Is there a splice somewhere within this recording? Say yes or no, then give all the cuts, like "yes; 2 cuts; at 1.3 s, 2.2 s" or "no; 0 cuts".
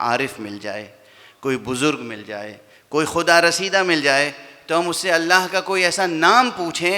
no; 0 cuts